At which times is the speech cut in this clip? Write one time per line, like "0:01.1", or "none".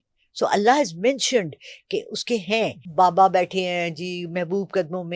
0:02.8